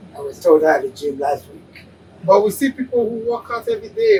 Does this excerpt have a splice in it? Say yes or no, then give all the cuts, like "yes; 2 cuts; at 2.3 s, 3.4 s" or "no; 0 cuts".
no; 0 cuts